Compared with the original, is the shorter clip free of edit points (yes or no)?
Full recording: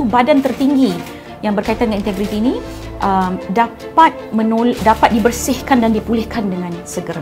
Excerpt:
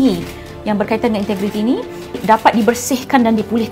no